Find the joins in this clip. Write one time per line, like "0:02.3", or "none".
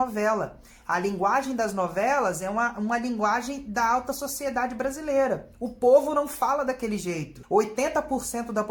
0:07.3